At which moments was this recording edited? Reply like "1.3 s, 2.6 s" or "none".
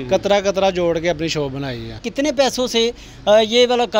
2.0 s